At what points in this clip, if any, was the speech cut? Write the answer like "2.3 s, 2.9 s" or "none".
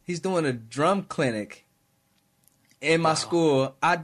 none